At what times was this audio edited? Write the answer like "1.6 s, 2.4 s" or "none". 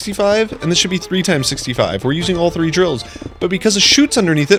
none